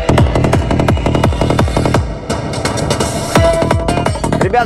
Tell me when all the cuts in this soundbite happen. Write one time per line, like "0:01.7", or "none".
none